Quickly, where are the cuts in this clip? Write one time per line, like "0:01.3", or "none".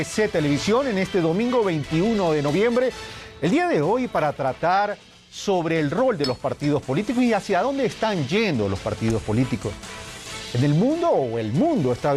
none